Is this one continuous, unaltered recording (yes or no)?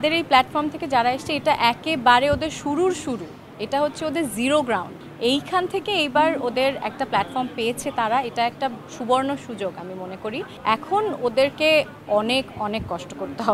yes